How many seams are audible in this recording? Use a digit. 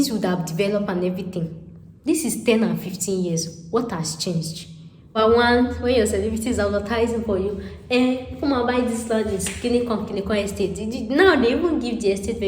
1